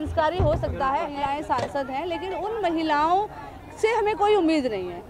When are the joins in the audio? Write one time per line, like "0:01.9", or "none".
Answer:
0:01.1